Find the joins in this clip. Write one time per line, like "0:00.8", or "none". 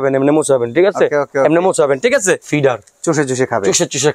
0:02.4